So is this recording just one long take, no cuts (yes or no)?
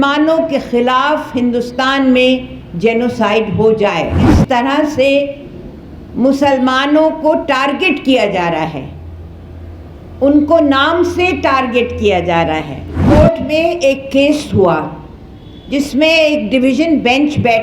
no